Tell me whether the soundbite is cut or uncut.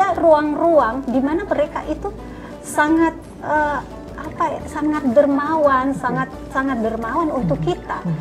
uncut